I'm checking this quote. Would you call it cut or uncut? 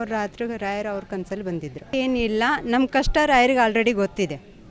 cut